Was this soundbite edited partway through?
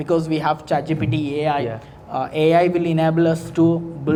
no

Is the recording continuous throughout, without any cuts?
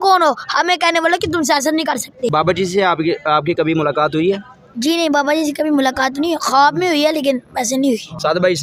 yes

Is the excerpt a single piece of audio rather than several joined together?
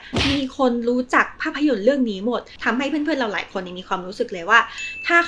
no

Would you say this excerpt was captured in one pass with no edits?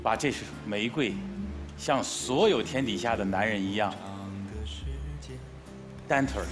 yes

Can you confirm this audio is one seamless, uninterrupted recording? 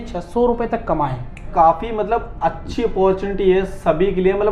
no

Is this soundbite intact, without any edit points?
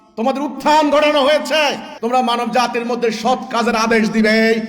no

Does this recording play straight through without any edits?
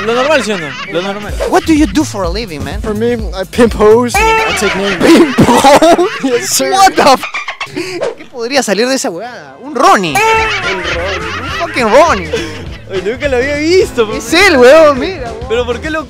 no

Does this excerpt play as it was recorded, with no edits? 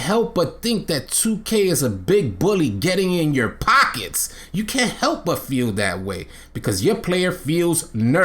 yes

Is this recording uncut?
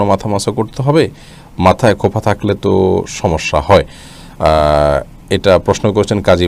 yes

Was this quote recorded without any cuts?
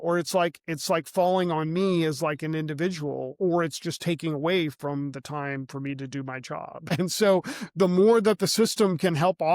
no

